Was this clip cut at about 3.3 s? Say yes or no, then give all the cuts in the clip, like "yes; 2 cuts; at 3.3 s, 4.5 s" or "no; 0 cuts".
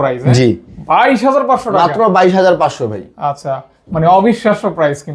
no; 0 cuts